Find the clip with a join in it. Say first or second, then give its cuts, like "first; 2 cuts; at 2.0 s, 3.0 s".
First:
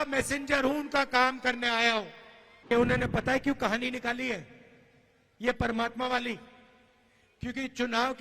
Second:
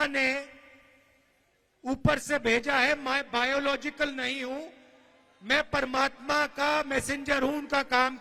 first; 1 cut; at 2.7 s